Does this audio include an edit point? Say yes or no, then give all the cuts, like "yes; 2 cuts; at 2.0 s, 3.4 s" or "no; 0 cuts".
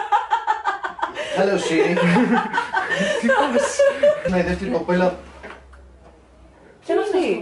yes; 1 cut; at 4.3 s